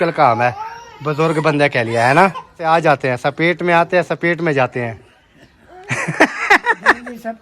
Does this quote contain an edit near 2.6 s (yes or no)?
yes